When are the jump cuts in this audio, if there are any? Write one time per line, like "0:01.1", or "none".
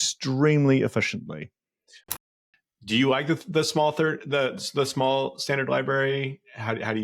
0:02.2